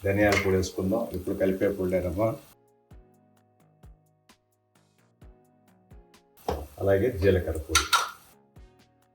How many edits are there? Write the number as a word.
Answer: zero